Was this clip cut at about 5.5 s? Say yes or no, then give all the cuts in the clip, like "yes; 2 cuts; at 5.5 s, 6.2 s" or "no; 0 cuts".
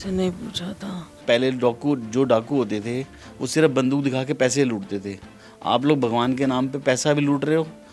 no; 1 cut; at 1.2 s